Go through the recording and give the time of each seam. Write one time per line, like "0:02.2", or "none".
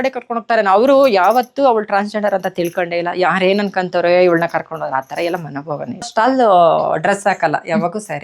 0:06.1